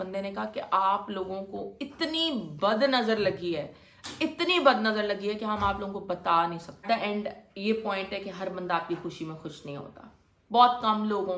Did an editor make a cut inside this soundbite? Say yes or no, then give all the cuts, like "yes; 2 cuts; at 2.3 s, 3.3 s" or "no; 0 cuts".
yes; 1 cut; at 6.7 s